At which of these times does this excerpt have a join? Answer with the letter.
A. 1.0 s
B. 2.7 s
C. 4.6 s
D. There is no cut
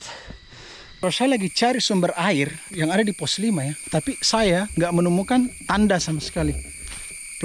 A